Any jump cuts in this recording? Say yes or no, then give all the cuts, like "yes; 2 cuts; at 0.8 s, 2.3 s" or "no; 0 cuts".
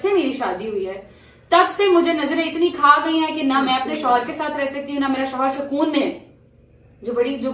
no; 0 cuts